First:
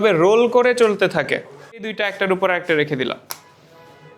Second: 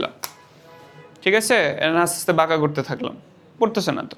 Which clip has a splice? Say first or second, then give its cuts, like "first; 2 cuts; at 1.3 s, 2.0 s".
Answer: first; 1 cut; at 2.0 s